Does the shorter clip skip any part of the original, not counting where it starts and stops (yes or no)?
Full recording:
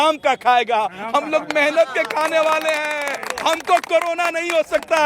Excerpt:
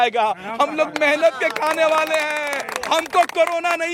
no